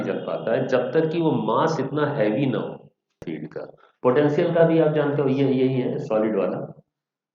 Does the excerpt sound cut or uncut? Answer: cut